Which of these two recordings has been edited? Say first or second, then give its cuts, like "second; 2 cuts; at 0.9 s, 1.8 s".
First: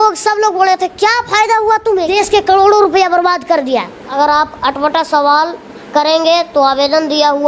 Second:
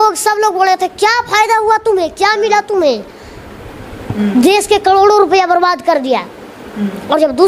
first; 2 cuts; at 2.1 s, 4.1 s